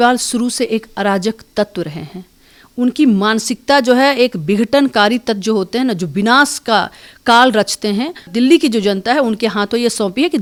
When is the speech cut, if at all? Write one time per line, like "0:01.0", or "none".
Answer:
none